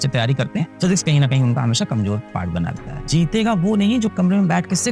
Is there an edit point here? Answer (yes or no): yes